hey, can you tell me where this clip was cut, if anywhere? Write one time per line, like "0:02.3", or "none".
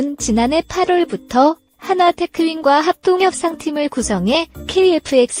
none